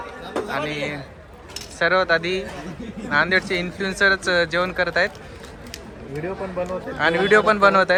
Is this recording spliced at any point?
no; 0 cuts

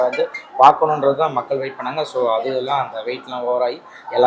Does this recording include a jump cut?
no; 0 cuts

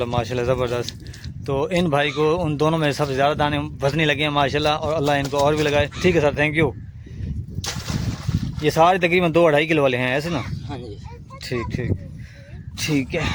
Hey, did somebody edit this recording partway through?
no; 0 cuts

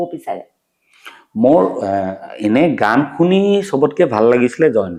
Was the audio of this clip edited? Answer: no; 0 cuts

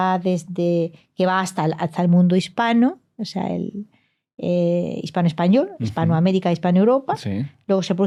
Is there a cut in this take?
no; 0 cuts

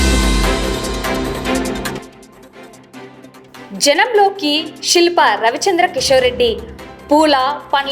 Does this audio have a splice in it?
yes; 2 cuts; at 2.0 s, 3.7 s

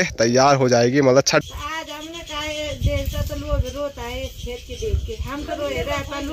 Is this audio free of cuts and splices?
no; 1 cut; at 1.4 s

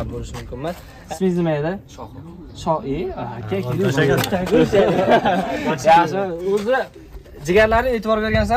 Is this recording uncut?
no; 1 cut; at 0.9 s

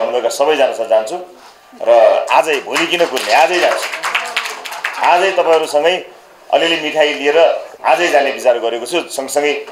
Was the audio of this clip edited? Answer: yes; 1 cut; at 7.7 s

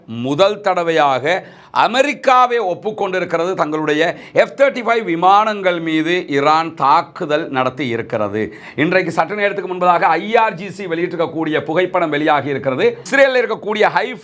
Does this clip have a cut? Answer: yes; 1 cut; at 13.0 s

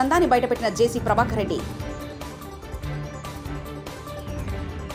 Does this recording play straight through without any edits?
yes; 0 cuts

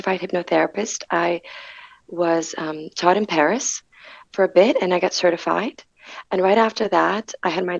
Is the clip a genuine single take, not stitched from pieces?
yes; 0 cuts

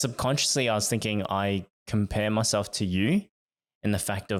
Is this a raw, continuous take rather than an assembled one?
yes; 0 cuts

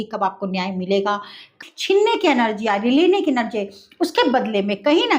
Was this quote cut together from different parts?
yes; 1 cut; at 1.5 s

